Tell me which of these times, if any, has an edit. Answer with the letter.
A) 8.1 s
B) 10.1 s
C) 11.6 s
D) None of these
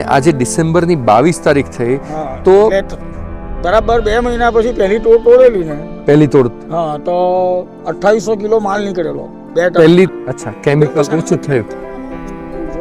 B